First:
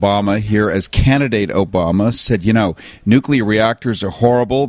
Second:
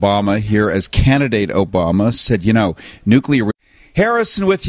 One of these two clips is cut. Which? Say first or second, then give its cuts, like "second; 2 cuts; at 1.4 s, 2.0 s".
first; 1 cut; at 3.5 s